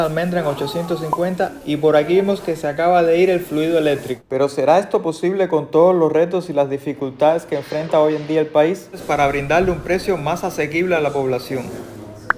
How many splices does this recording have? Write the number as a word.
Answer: two